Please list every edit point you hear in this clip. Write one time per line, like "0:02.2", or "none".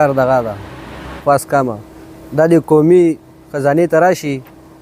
0:01.1